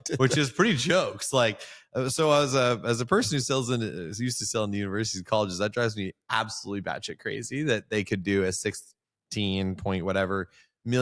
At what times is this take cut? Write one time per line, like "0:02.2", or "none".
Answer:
none